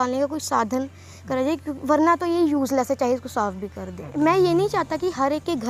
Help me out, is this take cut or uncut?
cut